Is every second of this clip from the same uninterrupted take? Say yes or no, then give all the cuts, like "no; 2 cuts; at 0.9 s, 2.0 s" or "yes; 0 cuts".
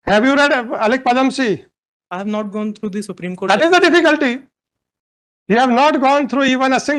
yes; 0 cuts